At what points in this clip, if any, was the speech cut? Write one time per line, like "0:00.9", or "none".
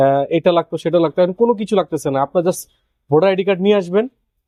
none